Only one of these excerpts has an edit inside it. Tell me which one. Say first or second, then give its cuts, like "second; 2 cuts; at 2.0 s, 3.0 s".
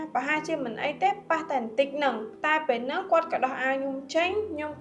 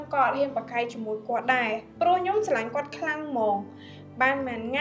first; 1 cut; at 2.3 s